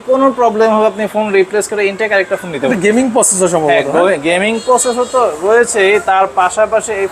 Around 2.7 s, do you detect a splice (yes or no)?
yes